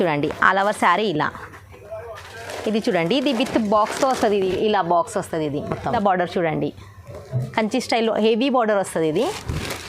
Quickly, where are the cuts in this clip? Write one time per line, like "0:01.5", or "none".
0:05.9